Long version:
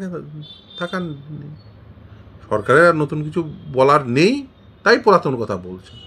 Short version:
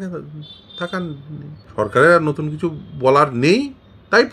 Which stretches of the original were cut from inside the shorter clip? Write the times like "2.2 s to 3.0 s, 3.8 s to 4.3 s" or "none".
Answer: 1.6 s to 2.3 s

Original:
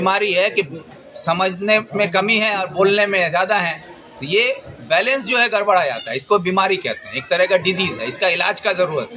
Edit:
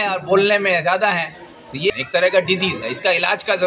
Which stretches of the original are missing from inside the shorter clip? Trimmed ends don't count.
4.4 s to 7.1 s

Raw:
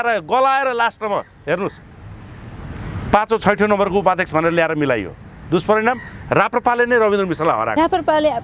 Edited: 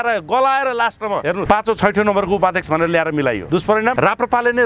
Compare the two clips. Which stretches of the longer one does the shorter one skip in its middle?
1.3 s to 3.0 s, 5.4 s to 6.1 s

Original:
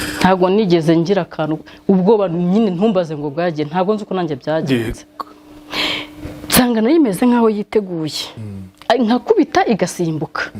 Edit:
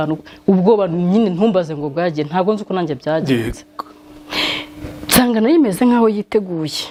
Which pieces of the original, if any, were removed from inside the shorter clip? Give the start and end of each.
none

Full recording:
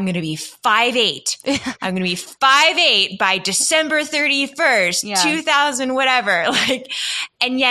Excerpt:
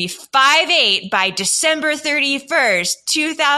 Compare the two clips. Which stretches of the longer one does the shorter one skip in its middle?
none

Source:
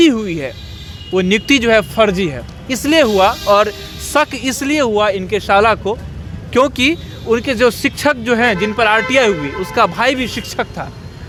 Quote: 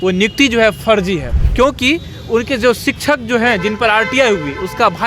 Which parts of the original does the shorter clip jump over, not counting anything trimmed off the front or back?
2.5 s to 6.3 s

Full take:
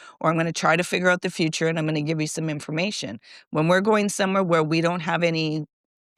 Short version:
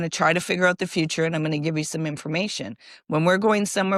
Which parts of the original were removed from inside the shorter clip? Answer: none

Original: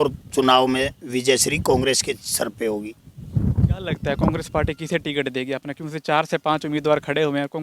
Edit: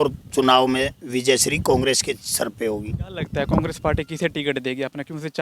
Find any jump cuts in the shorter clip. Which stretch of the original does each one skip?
3.1 s to 3.8 s

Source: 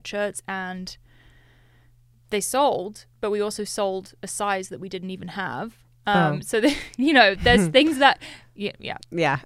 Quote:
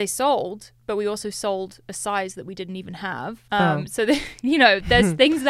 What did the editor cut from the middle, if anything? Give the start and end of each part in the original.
5.7 s to 5.9 s

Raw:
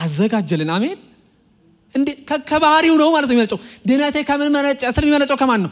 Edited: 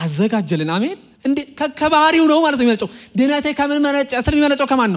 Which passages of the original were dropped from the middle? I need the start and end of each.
1.1 s to 1.8 s

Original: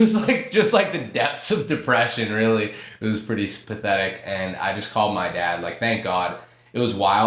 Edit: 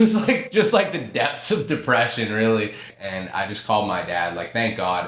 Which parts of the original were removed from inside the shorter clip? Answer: 2.9 s to 4.2 s

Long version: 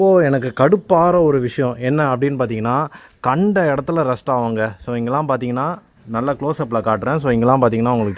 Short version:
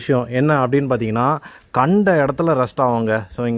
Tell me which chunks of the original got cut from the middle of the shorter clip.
none

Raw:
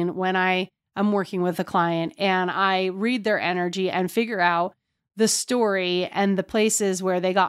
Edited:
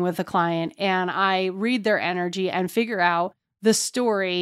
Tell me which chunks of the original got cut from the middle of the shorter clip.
4.8 s to 5.0 s

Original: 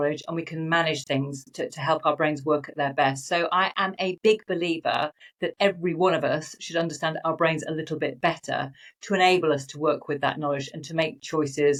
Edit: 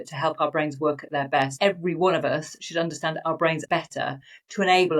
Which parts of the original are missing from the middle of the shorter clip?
3.2 s to 5.5 s, 7.6 s to 8.2 s

